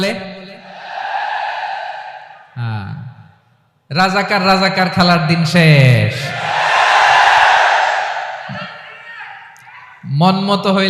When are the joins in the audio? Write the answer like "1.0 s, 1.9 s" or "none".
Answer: 1.2 s